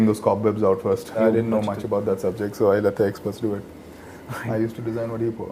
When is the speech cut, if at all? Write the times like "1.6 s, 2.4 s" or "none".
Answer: 1.2 s